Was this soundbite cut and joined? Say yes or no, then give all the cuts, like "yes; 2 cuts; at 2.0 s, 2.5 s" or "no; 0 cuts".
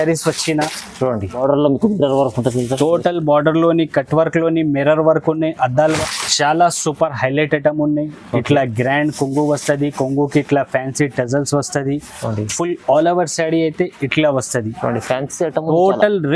yes; 2 cuts; at 1.3 s, 6.0 s